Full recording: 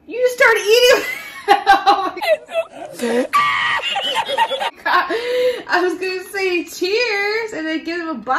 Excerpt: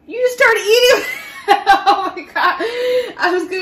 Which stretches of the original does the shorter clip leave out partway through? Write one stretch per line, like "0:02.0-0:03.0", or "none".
0:02.2-0:04.7